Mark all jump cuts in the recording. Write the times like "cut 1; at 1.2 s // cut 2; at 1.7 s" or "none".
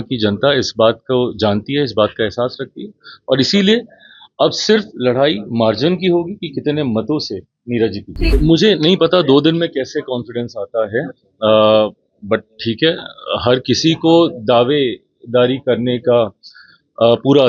cut 1; at 8.3 s